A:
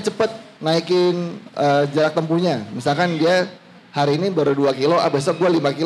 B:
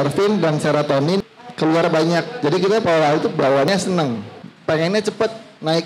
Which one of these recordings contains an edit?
B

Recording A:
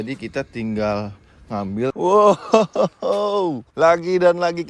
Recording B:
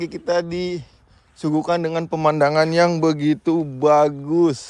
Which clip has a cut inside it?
A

